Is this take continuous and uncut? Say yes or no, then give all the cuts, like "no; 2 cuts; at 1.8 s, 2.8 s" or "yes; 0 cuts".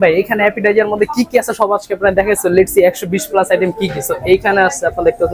yes; 0 cuts